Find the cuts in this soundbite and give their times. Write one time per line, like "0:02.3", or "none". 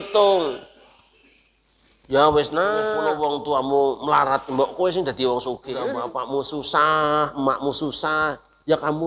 0:03.0
0:06.0